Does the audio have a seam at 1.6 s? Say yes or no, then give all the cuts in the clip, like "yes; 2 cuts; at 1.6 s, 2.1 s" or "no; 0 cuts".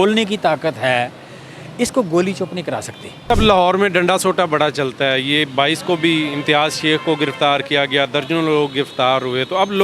no; 1 cut; at 3.3 s